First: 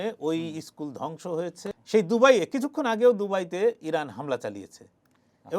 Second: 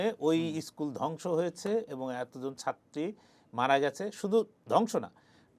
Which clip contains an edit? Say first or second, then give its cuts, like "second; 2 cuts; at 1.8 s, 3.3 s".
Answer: first; 1 cut; at 1.6 s